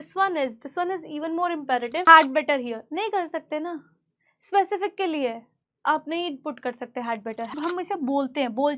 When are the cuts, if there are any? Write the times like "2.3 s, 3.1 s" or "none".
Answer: 2.0 s, 7.5 s